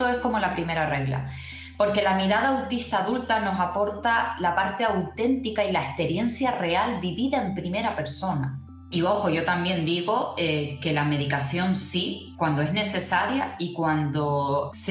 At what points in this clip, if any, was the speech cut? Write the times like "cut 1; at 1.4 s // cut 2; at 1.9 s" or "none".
cut 1; at 8.9 s